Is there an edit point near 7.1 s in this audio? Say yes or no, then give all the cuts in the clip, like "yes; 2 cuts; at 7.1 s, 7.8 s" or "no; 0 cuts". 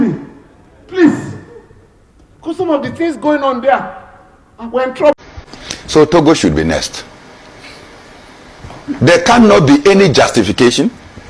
no; 1 cut; at 5.1 s